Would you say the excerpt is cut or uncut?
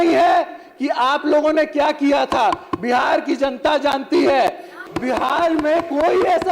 cut